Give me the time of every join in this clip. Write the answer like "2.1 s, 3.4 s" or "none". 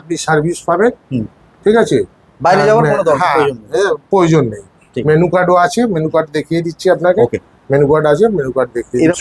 none